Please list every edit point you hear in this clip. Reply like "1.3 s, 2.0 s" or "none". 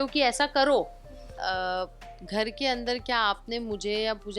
1.3 s